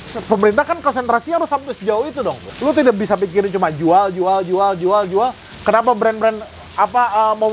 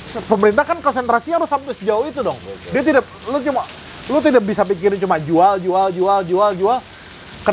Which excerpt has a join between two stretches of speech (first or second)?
first